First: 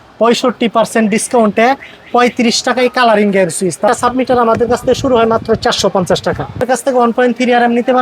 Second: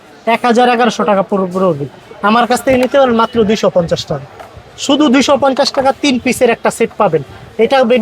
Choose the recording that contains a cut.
first; 2 cuts; at 3.9 s, 6.7 s

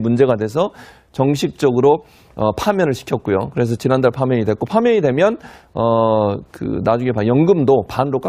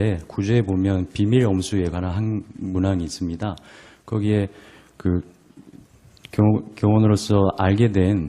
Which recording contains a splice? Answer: second; 1 cut; at 2.2 s

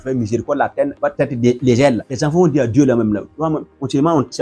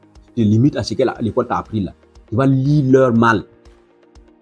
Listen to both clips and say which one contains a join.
first; 2 cuts; at 1.1 s, 2.1 s

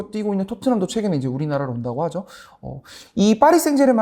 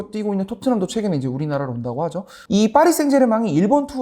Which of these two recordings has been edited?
second; 1 cut; at 2.3 s

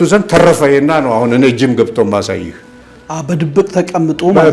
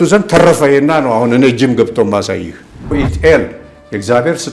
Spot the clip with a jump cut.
second; 1 cut; at 2.9 s

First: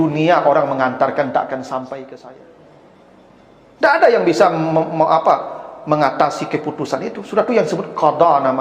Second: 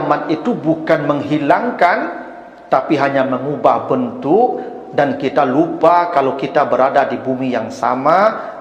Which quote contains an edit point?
first; 1 cut; at 2.2 s

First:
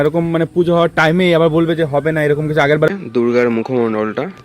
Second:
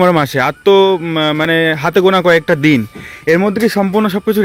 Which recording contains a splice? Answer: first; 1 cut; at 2.9 s

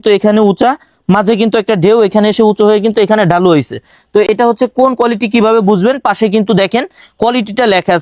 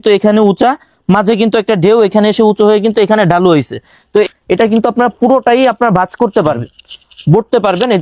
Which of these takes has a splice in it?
second; 1 cut; at 4.3 s

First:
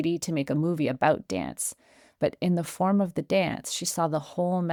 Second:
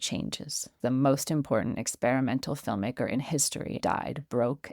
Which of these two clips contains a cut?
second; 2 cuts; at 0.8 s, 3.8 s

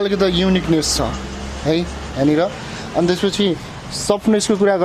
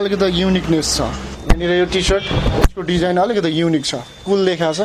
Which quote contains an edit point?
second; 1 cut; at 1.3 s

